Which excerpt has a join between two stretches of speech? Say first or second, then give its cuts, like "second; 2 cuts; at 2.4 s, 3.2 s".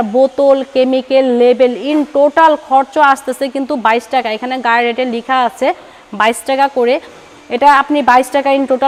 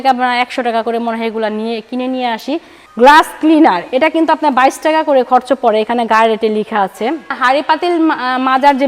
second; 2 cuts; at 2.8 s, 7.4 s